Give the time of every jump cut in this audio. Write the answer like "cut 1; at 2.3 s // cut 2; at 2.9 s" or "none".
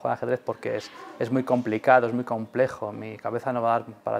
none